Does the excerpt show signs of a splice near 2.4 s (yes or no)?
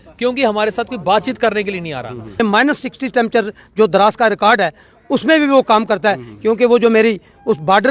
yes